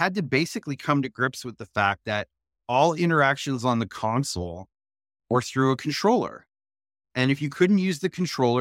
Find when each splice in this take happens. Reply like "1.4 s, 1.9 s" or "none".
none